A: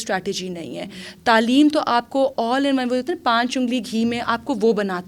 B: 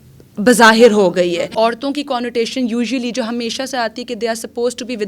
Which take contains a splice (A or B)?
B